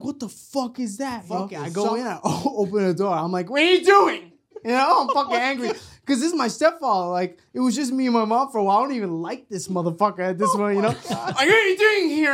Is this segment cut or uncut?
cut